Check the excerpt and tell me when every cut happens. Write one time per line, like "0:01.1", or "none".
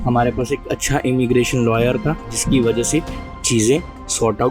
0:02.3

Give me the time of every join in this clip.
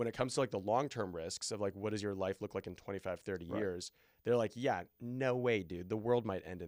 none

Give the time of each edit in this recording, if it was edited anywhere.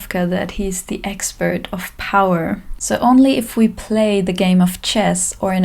0:02.8

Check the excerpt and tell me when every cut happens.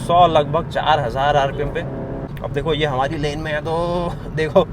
0:02.3

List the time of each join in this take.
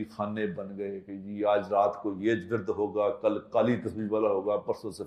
none

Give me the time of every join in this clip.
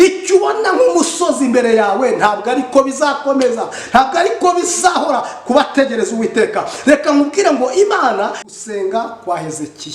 0:08.3

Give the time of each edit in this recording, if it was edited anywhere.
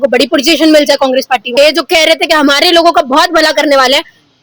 0:01.5

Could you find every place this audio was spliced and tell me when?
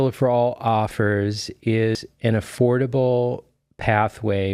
0:02.0

